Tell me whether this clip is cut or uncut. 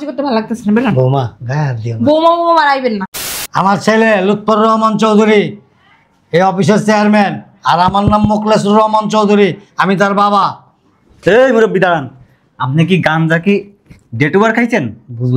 cut